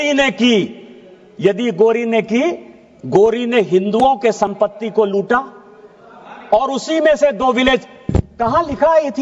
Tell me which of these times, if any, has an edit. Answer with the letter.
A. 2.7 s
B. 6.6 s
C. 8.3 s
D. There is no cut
D